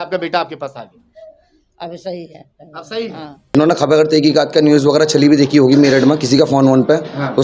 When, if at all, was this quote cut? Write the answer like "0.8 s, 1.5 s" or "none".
3.4 s